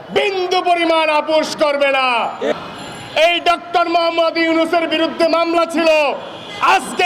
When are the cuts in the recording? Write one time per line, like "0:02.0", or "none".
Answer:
0:02.5